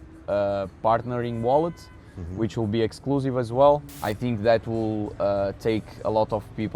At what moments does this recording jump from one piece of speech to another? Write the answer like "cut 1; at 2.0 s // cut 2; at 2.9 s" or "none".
cut 1; at 4.0 s